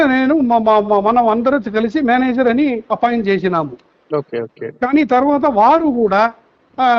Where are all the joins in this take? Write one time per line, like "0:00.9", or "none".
none